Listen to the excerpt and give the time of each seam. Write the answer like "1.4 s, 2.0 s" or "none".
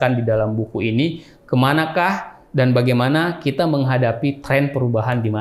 none